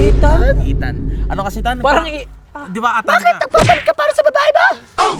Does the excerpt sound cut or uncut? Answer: uncut